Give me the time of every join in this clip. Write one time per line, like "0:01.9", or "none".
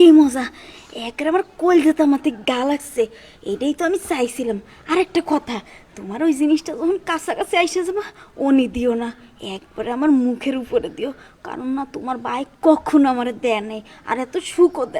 none